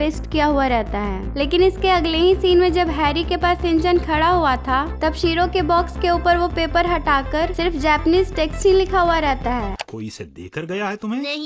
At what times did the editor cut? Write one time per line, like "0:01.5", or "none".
0:09.8